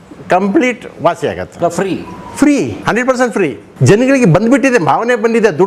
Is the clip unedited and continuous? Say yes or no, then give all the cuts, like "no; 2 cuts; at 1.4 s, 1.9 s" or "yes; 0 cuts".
no; 3 cuts; at 1.5 s, 2.8 s, 3.7 s